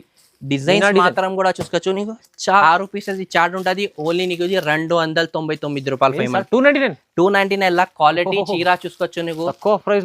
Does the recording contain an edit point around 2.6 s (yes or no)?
yes